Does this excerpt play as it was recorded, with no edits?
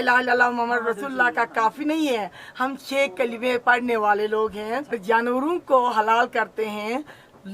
no; 1 cut; at 5.0 s

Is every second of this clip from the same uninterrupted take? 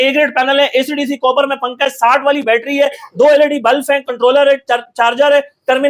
yes; 0 cuts

